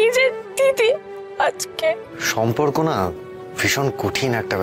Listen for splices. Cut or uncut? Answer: cut